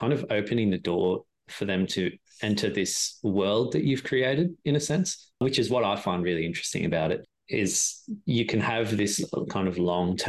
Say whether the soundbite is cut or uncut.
uncut